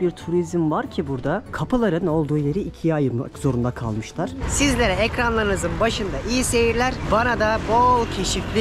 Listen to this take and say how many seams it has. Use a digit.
2